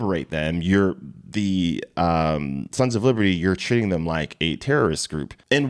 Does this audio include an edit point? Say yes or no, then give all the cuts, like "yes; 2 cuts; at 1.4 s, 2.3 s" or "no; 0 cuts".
no; 0 cuts